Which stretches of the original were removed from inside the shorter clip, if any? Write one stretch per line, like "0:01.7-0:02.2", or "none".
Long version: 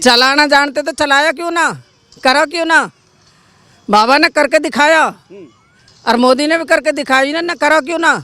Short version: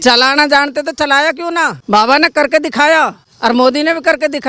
0:01.8-0:03.8
0:05.2-0:05.9